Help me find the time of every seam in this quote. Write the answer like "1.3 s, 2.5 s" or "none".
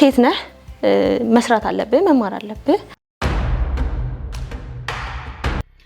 2.9 s